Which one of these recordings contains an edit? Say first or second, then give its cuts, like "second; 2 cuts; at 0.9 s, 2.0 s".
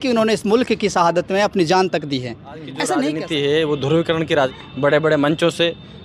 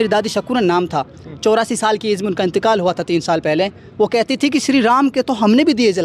first; 2 cuts; at 3.0 s, 4.6 s